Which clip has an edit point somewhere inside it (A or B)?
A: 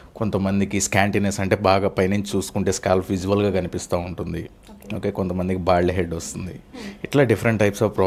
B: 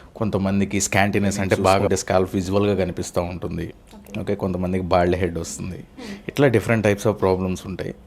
B